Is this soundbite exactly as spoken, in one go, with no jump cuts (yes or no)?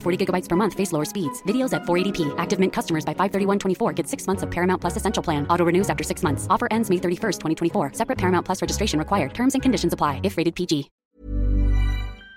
no